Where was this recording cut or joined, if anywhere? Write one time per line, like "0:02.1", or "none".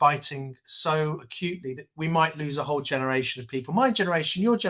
none